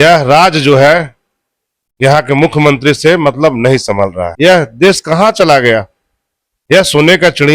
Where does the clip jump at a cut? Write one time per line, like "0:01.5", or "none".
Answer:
0:04.2

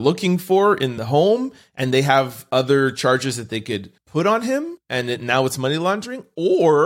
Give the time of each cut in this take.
0:00.9
0:04.0
0:04.8

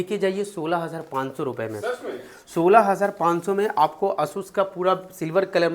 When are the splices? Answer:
none

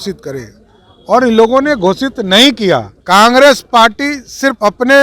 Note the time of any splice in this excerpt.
0:02.9

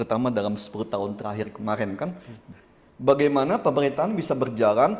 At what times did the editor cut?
0:02.4

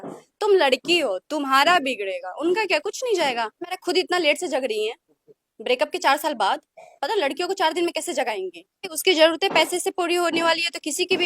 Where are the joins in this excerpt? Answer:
0:03.8
0:08.9

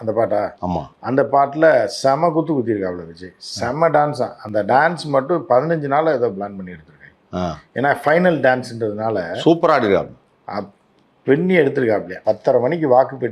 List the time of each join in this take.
0:12.1

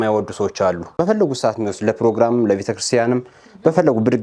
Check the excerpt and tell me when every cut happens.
0:01.0

